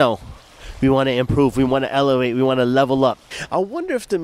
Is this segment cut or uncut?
cut